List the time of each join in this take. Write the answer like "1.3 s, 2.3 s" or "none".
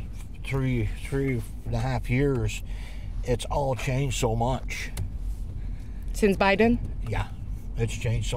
none

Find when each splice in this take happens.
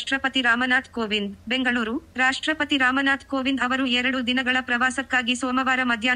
1.4 s

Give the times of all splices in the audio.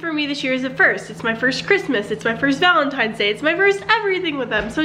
none

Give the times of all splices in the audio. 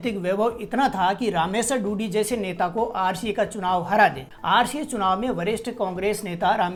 none

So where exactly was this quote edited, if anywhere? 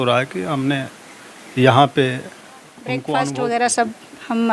3.1 s

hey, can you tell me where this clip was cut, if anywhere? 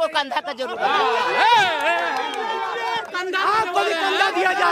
3.1 s

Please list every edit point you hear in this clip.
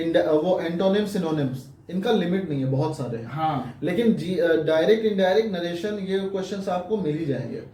none

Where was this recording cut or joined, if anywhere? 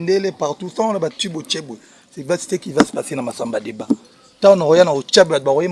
none

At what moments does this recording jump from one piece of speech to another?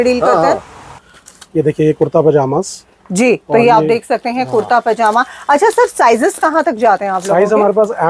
0.9 s

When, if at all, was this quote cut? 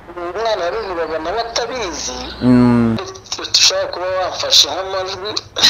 3.2 s

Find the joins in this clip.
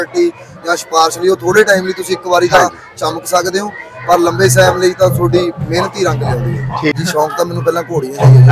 6.9 s

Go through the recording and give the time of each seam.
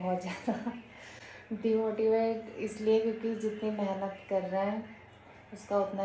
none

